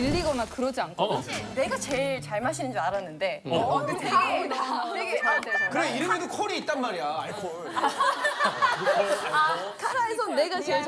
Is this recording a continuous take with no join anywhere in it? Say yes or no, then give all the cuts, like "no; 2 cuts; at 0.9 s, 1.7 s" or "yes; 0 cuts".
no; 1 cut; at 1.4 s